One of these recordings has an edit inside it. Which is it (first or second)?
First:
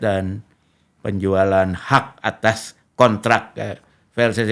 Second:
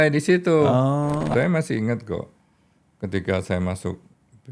second